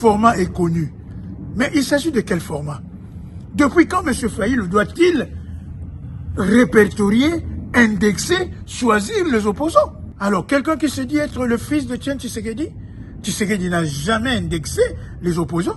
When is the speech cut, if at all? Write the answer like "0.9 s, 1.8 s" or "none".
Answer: 10.0 s